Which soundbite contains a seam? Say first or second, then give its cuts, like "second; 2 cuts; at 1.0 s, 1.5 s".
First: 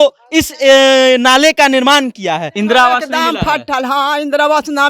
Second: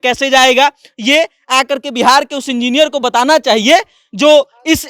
first; 1 cut; at 2.5 s